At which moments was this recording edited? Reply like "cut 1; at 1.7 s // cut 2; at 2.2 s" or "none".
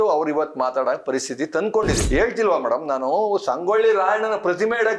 cut 1; at 2.0 s